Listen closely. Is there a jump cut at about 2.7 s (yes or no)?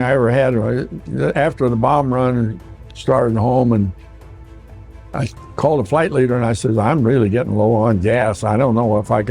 no